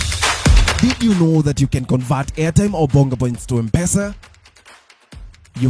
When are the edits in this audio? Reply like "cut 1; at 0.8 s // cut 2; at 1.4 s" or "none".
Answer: none